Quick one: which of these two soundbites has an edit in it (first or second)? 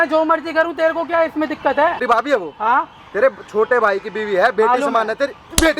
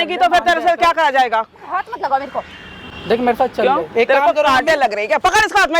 first